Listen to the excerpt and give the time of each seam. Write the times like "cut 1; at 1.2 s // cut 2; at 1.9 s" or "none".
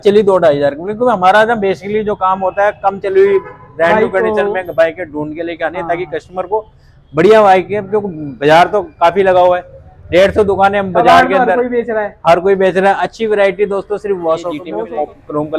cut 1; at 14.6 s